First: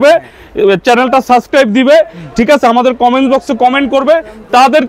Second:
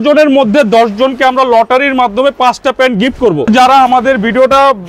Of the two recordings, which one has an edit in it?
second; 1 cut; at 3.5 s

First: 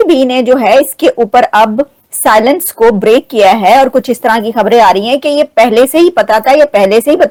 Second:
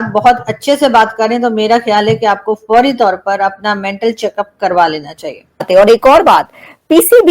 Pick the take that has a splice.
second; 1 cut; at 5.7 s

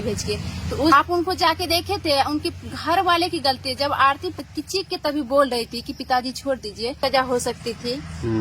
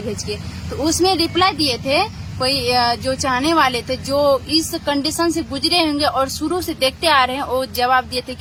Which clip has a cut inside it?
first; 3 cuts; at 0.9 s, 4.4 s, 7.0 s

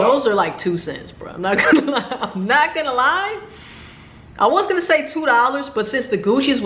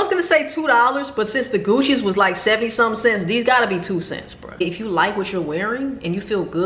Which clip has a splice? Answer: second; 1 cut; at 4.6 s

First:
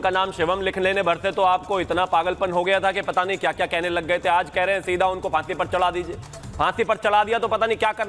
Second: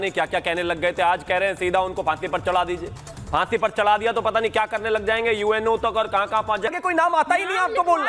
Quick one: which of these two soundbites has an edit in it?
second; 1 cut; at 6.7 s

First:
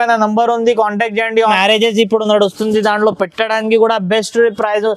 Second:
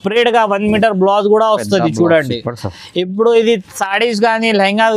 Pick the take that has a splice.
first; 1 cut; at 1.6 s

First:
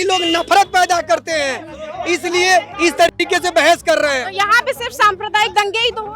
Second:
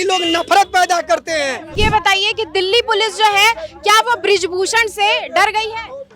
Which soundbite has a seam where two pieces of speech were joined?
second; 1 cut; at 1.7 s

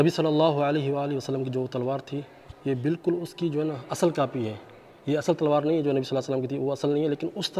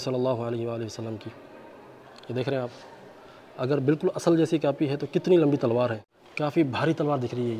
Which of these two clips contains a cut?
second; 1 cut; at 6.4 s

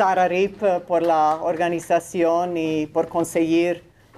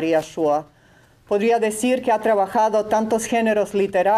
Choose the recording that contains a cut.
second; 1 cut; at 3.2 s

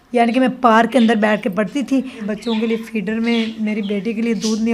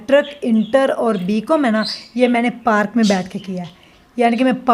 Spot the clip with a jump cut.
first; 1 cut; at 2.2 s

